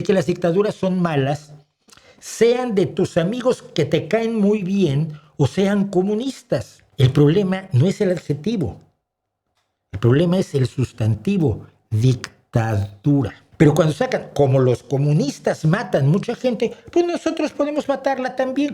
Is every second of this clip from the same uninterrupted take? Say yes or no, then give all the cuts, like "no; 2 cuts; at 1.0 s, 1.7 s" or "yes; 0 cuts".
no; 2 cuts; at 6.8 s, 13.4 s